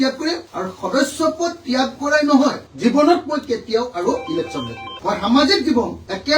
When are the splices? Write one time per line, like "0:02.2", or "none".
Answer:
0:02.6
0:04.9